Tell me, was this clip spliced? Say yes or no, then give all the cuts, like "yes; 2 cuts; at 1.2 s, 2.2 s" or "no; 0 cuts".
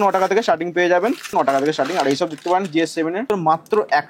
yes; 2 cuts; at 1.3 s, 3.3 s